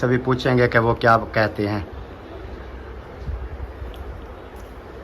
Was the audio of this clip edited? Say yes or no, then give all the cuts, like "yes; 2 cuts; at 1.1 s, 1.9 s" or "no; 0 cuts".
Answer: no; 0 cuts